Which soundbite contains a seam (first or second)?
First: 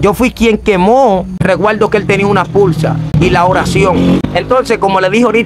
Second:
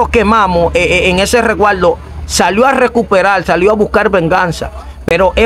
first